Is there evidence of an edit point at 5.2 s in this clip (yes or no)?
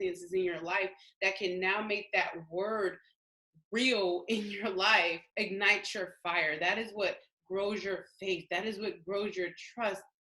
yes